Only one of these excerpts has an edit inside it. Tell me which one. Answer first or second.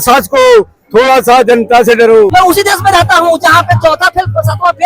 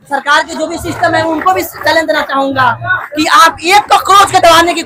first